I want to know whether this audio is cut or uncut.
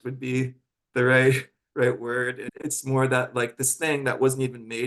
cut